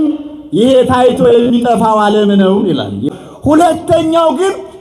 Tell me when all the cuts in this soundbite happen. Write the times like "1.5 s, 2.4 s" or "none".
3.1 s